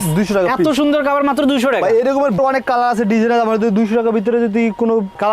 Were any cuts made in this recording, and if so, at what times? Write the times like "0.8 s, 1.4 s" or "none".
none